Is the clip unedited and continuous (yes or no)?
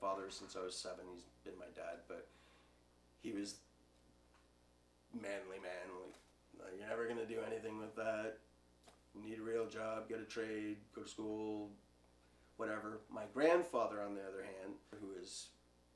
no